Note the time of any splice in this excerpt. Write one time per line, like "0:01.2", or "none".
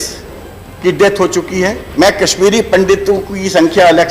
0:01.8